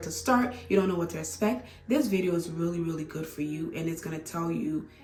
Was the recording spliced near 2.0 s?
no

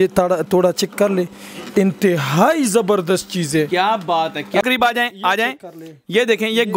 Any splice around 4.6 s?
yes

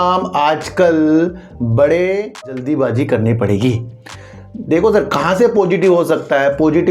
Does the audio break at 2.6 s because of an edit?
yes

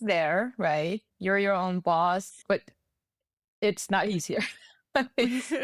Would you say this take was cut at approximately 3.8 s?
no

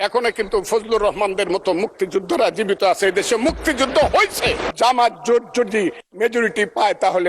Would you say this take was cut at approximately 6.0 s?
no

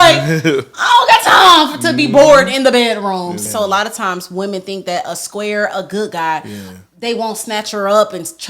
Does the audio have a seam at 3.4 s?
yes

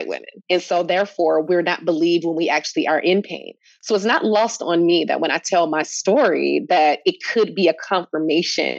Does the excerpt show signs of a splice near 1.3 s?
no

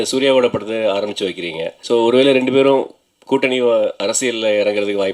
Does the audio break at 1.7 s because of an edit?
yes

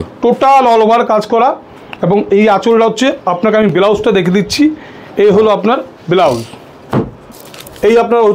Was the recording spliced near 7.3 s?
yes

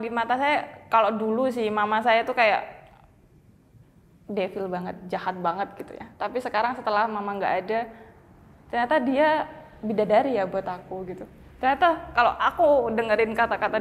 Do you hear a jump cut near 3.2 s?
no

